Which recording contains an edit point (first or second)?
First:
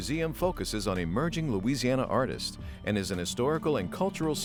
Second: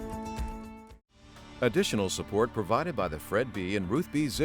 second